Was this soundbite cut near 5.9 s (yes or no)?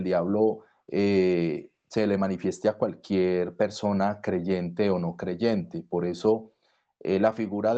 no